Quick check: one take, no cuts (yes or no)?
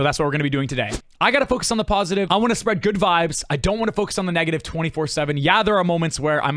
no